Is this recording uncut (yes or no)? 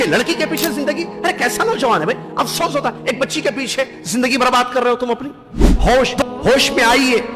no